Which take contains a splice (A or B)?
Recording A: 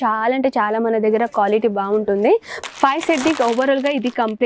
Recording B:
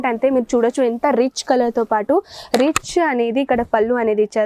A